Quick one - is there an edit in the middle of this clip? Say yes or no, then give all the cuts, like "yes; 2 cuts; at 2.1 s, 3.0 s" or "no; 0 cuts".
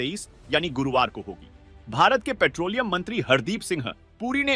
yes; 1 cut; at 1.8 s